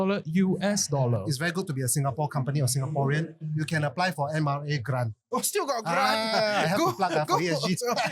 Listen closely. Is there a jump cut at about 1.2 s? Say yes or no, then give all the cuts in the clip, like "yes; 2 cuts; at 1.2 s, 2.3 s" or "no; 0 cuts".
yes; 1 cut; at 1.2 s